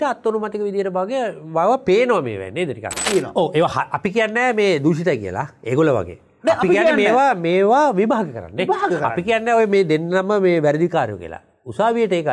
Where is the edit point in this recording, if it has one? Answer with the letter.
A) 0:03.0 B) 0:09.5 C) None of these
A